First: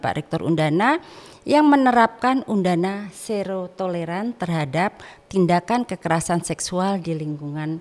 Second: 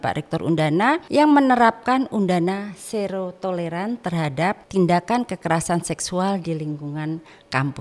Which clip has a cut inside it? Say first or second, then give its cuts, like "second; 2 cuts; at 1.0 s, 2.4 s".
second; 2 cuts; at 1.0 s, 4.6 s